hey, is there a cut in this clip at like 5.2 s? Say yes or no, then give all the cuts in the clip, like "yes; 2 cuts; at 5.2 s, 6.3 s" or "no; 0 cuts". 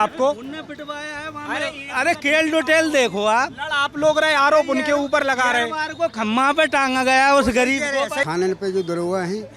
no; 1 cut; at 8.2 s